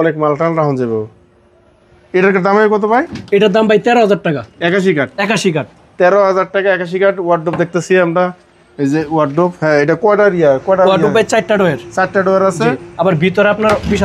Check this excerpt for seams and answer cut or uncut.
uncut